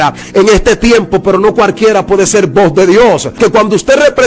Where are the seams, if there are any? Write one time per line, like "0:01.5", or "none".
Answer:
0:03.4